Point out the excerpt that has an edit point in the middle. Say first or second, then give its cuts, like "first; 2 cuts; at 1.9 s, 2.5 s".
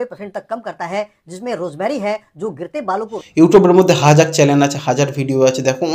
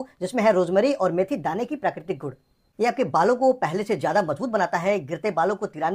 first; 1 cut; at 3.2 s